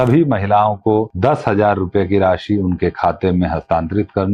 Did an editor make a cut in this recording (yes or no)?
yes